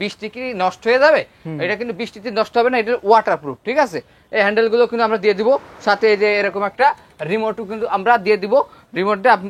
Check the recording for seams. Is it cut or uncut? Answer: uncut